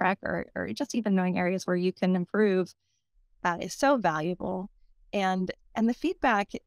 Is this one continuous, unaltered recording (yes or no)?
yes